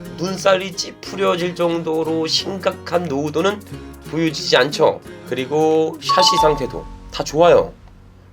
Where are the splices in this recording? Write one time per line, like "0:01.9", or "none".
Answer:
0:05.2